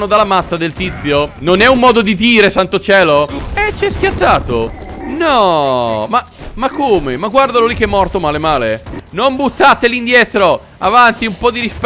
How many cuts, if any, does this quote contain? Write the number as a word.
two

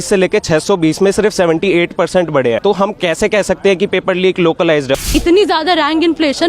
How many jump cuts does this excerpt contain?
two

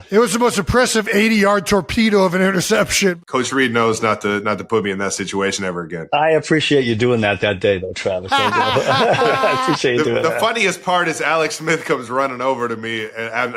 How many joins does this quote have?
two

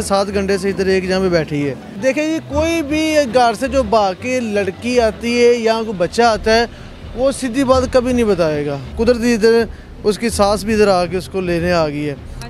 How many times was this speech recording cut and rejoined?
two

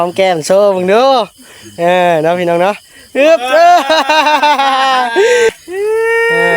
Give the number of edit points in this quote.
one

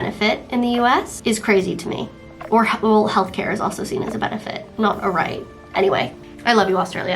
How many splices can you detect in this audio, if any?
three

